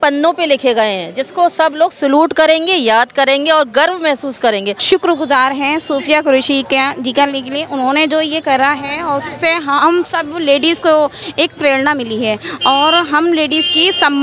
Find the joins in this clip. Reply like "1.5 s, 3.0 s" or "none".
4.8 s